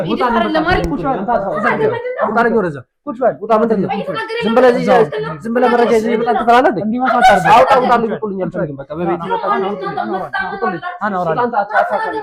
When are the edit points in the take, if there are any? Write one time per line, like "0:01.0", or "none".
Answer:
none